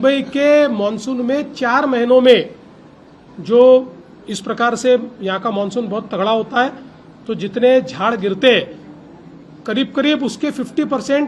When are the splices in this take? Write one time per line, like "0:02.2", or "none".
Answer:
none